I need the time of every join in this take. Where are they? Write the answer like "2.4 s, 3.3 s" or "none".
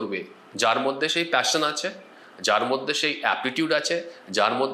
none